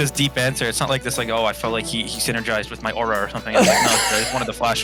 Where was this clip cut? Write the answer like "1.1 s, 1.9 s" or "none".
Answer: none